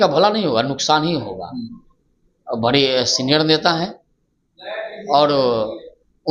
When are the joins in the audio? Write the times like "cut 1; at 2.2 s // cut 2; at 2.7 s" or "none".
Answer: none